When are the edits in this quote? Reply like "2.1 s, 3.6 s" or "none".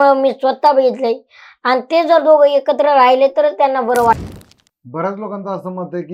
4.2 s

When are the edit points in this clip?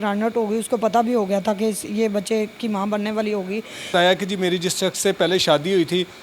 3.9 s

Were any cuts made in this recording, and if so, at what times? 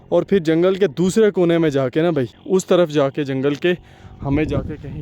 2.4 s

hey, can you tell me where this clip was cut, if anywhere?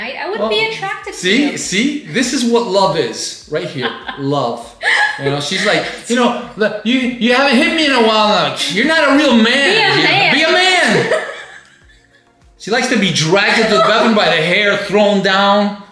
none

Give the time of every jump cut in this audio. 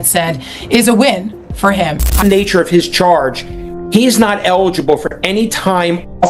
2.2 s

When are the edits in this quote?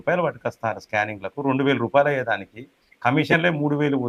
none

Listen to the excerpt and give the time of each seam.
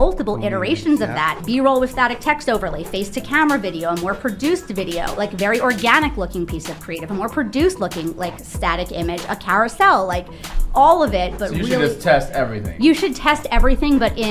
1.3 s, 5.2 s

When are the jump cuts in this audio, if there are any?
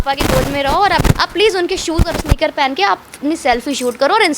1.0 s

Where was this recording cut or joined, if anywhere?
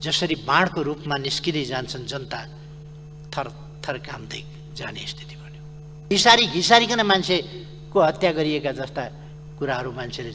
6.0 s

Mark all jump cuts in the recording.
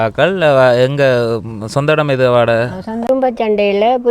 3.0 s

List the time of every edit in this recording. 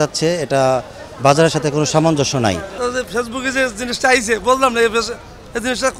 2.7 s

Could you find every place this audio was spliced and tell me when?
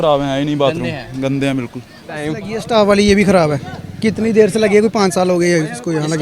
2.3 s

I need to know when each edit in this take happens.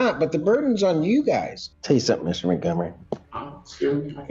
1.6 s

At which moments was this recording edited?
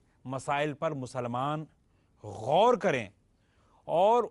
2.3 s

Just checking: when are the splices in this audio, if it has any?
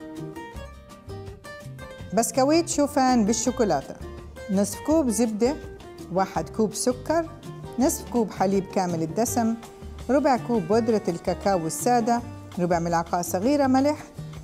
2.0 s

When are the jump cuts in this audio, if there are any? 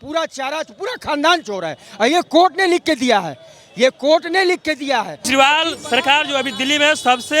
5.3 s

